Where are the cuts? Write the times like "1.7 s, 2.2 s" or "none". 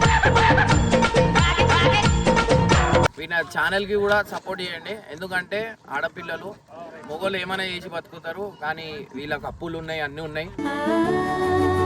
3.1 s

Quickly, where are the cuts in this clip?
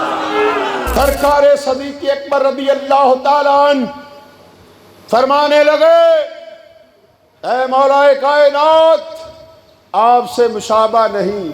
0.9 s

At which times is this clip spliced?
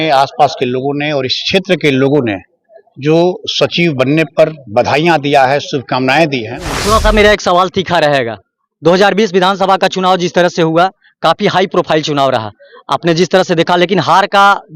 6.6 s

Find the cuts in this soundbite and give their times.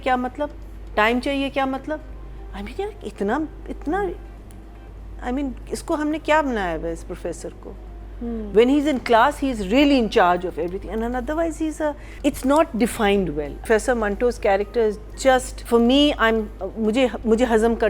12.1 s, 13.5 s, 15.5 s

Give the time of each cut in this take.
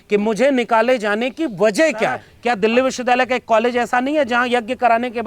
2.3 s

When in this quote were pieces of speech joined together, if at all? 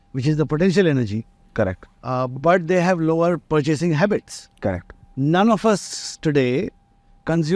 3.4 s

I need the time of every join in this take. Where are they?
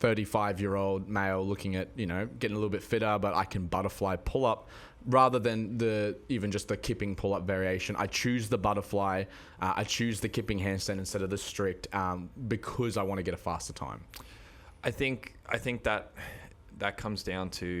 none

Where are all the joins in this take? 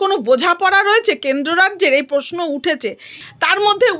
3.1 s

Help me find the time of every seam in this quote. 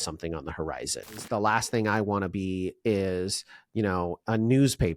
1.2 s

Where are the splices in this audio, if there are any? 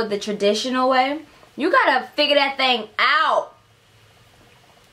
none

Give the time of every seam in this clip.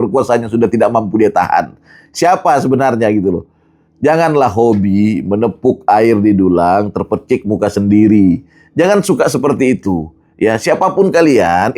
none

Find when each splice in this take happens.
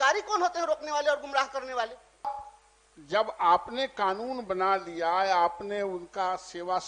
2.3 s

